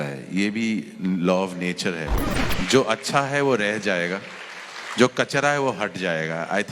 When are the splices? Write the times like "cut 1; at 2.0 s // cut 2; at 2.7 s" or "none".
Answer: cut 1; at 2.2 s